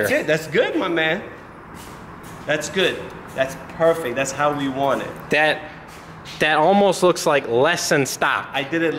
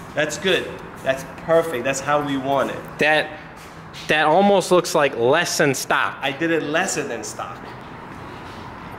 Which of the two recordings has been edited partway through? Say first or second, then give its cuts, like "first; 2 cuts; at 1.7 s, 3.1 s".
second; 1 cut; at 7.8 s